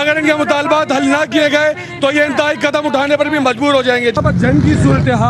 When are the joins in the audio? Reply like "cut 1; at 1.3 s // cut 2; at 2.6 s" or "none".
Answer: cut 1; at 4.1 s

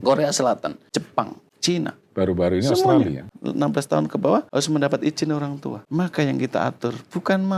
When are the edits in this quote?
cut 1; at 1.1 s // cut 2; at 3.3 s // cut 3; at 4.5 s // cut 4; at 5.7 s

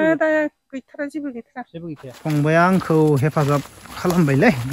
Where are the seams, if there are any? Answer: cut 1; at 2.1 s

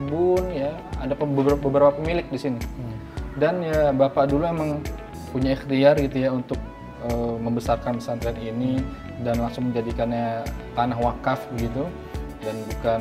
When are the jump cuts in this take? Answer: cut 1; at 5.3 s

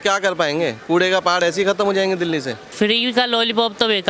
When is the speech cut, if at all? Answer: cut 1; at 2.5 s

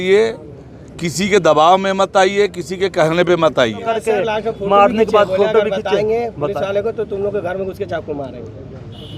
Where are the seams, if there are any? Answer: cut 1; at 3.9 s

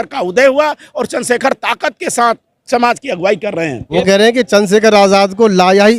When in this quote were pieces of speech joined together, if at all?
cut 1; at 3.8 s

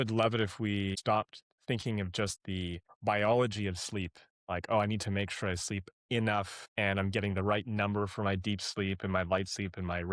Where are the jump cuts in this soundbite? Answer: cut 1; at 1.0 s // cut 2; at 2.9 s // cut 3; at 6.6 s

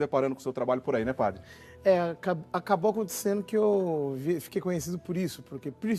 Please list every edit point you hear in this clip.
cut 1; at 1.5 s

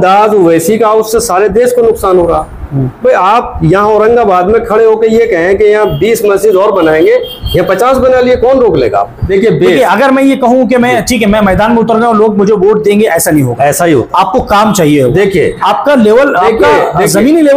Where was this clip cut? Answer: cut 1; at 9.2 s

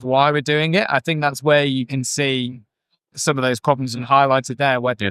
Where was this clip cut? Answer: cut 1; at 3.1 s

